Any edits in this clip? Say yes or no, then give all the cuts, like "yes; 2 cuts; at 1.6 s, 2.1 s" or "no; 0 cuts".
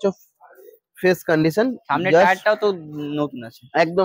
no; 0 cuts